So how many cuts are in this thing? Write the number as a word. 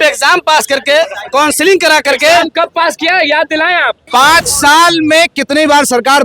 one